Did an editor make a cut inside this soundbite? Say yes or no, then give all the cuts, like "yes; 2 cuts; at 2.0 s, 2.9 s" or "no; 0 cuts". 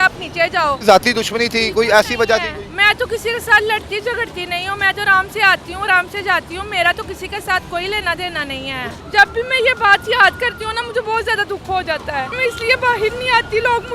yes; 3 cuts; at 0.8 s, 9.0 s, 12.4 s